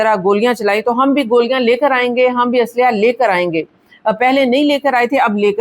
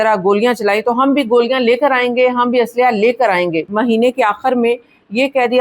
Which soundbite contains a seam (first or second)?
second